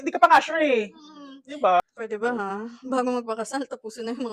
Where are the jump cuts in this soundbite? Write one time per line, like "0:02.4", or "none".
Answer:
0:01.8